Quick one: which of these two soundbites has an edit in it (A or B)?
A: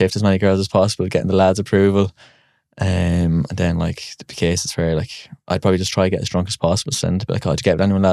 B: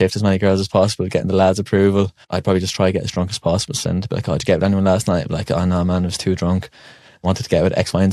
B